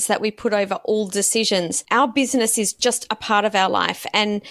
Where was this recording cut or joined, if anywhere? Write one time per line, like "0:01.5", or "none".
0:01.8
0:02.8